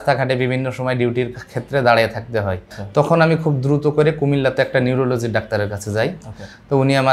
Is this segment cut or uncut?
cut